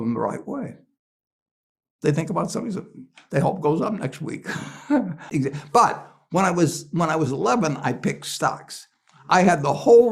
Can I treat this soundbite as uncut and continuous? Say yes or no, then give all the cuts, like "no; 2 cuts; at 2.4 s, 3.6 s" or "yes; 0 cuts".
no; 1 cut; at 5.2 s